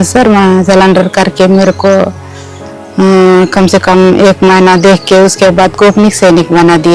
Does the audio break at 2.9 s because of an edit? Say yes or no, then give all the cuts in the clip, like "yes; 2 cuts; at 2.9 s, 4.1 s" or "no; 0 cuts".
no; 0 cuts